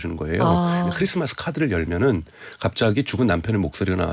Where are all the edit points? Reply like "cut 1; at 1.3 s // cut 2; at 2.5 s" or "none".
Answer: cut 1; at 0.9 s